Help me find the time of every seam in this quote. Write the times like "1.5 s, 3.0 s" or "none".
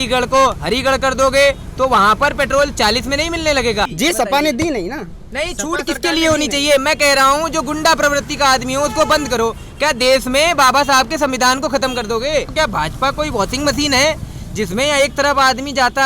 3.9 s, 12.5 s